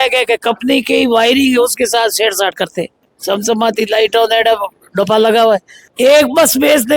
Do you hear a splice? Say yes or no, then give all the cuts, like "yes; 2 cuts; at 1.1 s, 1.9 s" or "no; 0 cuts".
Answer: yes; 2 cuts; at 3.1 s, 5.8 s